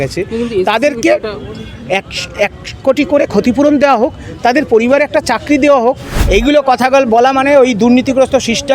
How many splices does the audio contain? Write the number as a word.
one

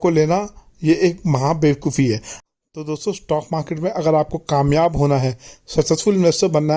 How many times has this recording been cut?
zero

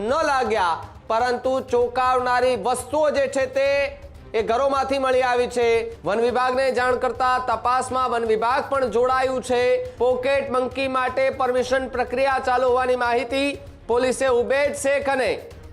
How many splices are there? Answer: two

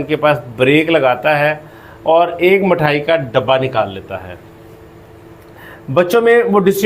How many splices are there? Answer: zero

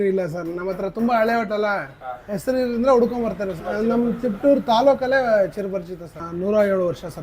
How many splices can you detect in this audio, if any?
one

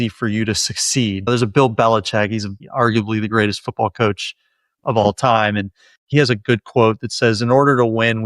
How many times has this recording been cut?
one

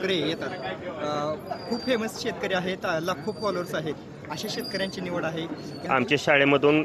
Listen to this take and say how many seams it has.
one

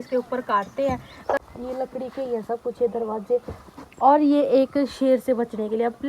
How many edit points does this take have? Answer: one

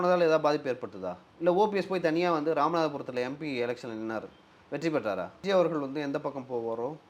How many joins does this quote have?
one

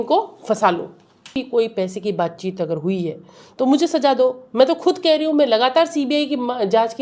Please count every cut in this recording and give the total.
one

